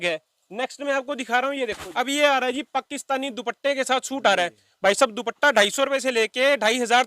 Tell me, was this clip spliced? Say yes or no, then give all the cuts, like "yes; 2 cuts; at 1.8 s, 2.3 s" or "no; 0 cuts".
yes; 1 cut; at 1.8 s